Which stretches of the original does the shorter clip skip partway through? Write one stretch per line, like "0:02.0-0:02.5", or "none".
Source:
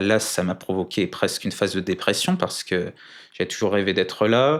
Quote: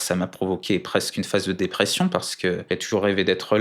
0:02.9-0:03.3